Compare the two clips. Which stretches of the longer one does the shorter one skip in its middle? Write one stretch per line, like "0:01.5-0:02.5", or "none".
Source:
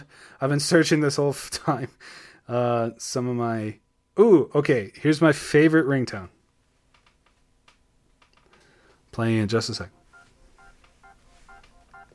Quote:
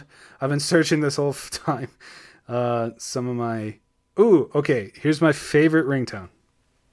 none